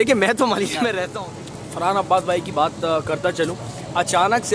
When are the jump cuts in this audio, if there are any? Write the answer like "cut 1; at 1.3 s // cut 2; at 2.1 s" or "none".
cut 1; at 1.1 s